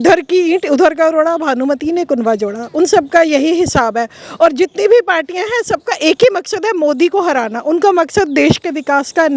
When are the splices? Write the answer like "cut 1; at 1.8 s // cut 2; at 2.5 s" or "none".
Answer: none